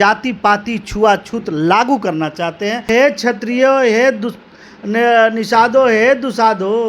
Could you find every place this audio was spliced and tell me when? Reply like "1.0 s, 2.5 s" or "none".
2.9 s